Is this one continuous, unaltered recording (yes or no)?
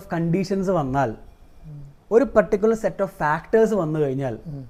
yes